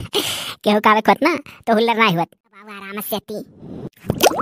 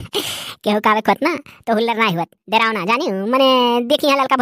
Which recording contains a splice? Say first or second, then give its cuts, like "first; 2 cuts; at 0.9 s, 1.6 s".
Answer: first; 1 cut; at 2.4 s